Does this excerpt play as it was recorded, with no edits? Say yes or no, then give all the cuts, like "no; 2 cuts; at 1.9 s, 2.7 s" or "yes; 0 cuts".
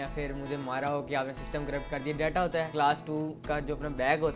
no; 1 cut; at 2.7 s